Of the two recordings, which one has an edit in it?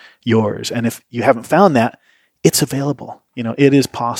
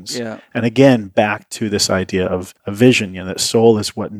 second; 1 cut; at 2.6 s

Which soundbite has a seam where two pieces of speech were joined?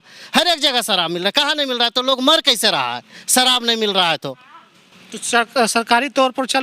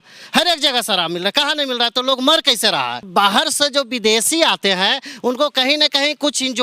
second; 1 cut; at 3.1 s

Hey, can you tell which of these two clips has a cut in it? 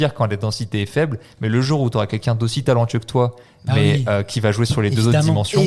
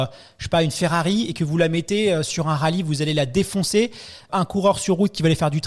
second; 1 cut; at 4.3 s

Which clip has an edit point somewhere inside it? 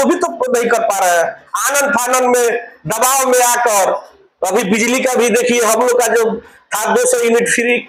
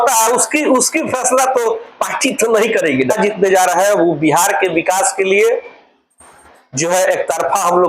second; 1 cut; at 3.1 s

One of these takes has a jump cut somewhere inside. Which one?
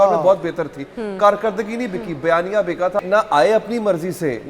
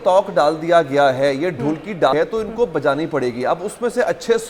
first; 1 cut; at 3.0 s

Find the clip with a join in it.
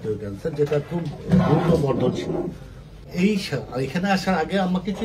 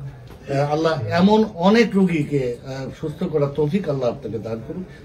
first; 1 cut; at 3.1 s

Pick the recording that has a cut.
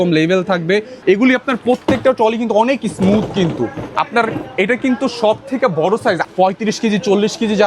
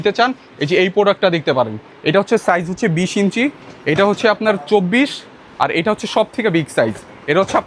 first; 2 cuts; at 0.9 s, 6.2 s

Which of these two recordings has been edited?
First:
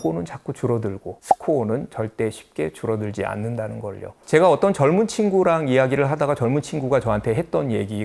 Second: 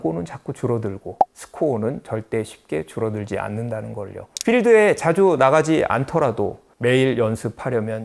first; 2 cuts; at 1.2 s, 4.2 s

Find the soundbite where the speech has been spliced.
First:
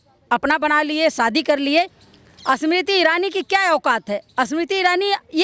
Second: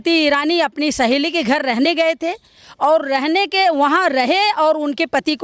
first; 1 cut; at 2.0 s

